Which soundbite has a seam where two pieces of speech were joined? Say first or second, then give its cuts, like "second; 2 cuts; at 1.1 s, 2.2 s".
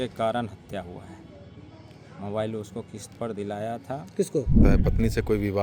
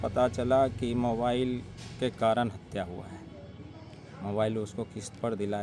first; 1 cut; at 4.5 s